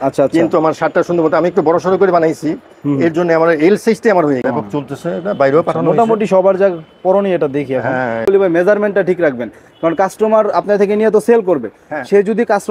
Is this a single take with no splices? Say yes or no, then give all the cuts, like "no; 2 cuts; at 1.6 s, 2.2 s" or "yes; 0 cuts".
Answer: no; 2 cuts; at 4.4 s, 8.2 s